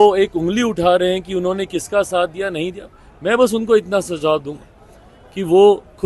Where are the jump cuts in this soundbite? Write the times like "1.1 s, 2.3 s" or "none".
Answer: none